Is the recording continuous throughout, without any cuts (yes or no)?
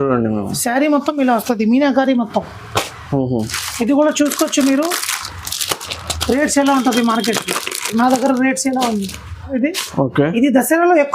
no